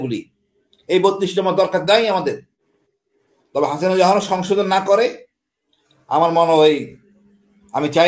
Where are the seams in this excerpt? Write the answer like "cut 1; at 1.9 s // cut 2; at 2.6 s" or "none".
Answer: cut 1; at 2.6 s